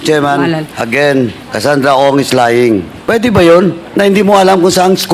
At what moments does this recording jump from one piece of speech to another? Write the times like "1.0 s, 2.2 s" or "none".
1.4 s, 2.9 s, 3.8 s